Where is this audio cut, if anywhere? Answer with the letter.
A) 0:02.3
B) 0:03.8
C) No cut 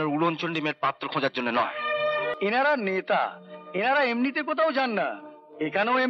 A